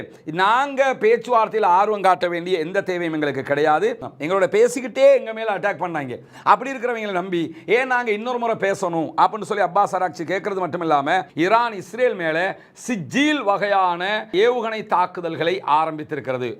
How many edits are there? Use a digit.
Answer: 2